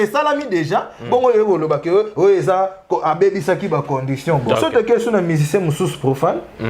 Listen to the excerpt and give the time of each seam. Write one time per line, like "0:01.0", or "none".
0:04.5